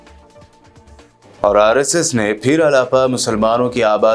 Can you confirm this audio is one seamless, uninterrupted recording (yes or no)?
yes